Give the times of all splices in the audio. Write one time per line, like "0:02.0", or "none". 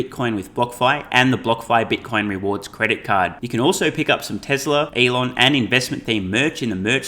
0:04.9